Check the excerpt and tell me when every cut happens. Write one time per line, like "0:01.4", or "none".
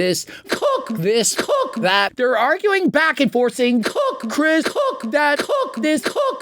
0:02.1